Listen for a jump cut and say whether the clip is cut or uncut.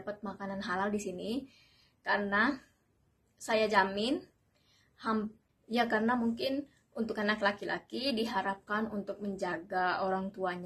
cut